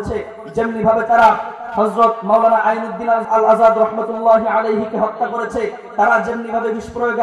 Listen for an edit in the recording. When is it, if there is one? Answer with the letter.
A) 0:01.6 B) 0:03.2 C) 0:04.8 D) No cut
B